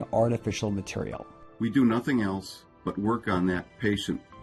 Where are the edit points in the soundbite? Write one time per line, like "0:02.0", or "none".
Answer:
0:01.3